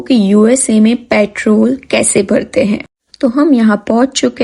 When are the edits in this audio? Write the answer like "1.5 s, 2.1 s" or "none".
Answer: none